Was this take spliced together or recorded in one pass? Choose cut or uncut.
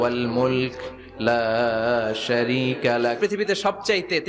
cut